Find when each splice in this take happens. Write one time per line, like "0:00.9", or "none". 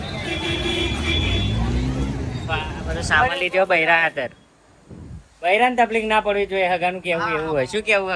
0:02.5